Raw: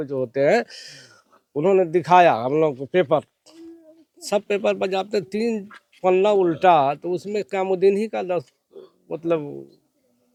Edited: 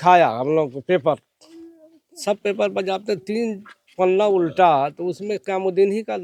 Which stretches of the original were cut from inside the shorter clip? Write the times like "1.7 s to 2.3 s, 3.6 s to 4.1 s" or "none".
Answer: none